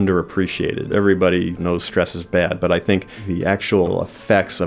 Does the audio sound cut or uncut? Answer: cut